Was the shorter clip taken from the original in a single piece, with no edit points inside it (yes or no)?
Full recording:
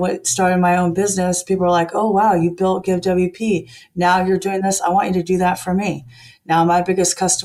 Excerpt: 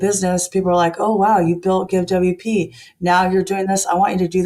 yes